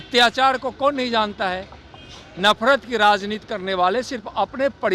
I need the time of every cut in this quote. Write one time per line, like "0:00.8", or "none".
none